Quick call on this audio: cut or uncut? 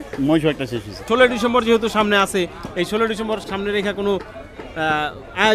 cut